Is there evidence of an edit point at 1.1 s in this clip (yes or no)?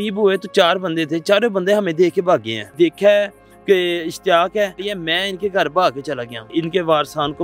no